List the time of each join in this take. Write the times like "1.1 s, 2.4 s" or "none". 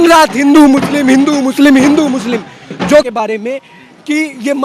3.1 s